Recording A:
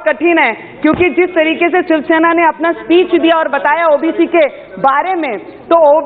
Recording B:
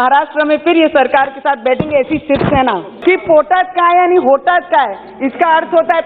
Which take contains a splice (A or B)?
B